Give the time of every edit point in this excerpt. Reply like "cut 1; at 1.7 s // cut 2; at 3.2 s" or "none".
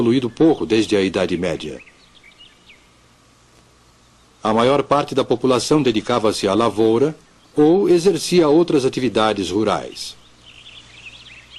none